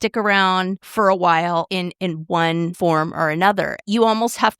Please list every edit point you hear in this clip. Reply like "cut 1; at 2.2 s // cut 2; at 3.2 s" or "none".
cut 1; at 0.8 s // cut 2; at 1.7 s // cut 3; at 2.7 s // cut 4; at 3.8 s

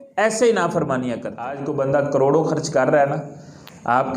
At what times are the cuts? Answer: cut 1; at 1.6 s

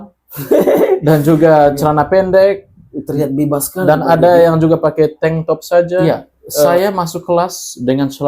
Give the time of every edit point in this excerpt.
cut 1; at 6.7 s

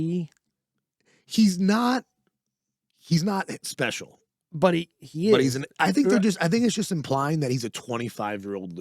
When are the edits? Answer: none

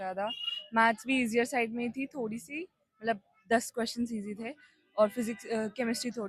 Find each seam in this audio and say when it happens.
none

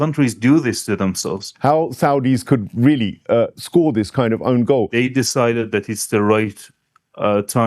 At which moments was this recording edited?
cut 1; at 1.4 s // cut 2; at 4.9 s

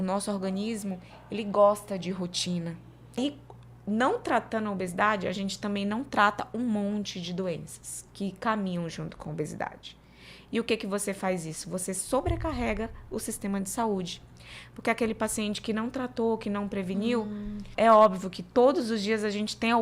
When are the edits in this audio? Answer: cut 1; at 3.2 s // cut 2; at 17.7 s

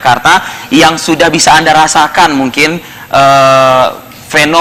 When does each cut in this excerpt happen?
cut 1; at 3.6 s

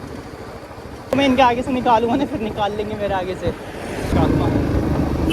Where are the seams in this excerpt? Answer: cut 1; at 1.1 s // cut 2; at 4.1 s

